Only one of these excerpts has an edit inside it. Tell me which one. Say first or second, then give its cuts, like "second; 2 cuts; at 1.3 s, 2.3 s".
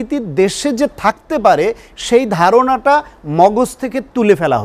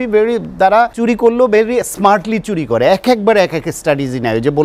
second; 1 cut; at 0.9 s